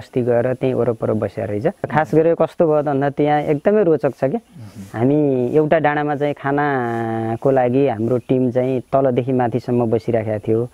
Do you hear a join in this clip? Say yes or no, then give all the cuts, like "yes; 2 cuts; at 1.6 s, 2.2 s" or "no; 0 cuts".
yes; 1 cut; at 1.9 s